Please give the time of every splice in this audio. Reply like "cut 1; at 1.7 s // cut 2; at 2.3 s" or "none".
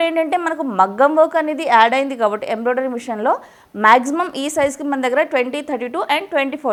none